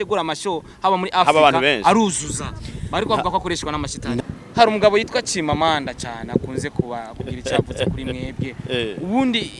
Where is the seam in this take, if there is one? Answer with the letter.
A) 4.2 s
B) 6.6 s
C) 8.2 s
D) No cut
A